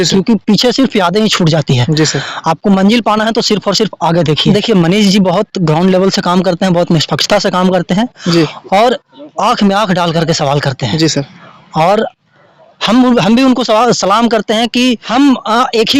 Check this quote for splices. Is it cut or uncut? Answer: cut